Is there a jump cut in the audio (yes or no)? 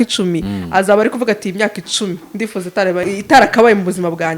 yes